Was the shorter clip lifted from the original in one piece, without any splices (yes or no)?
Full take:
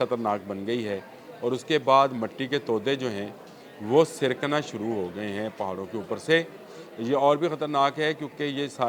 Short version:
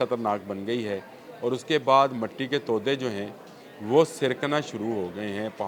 yes